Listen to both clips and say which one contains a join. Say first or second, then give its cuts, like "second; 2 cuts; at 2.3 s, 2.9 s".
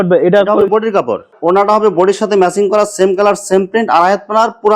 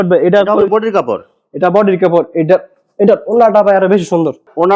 first; 1 cut; at 1.3 s